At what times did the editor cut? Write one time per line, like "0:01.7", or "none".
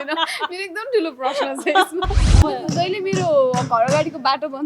0:02.2